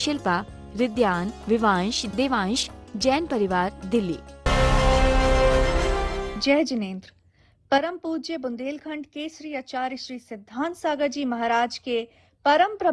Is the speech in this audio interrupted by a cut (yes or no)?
yes